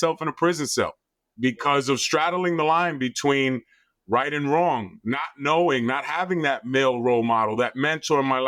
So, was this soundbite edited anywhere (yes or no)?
no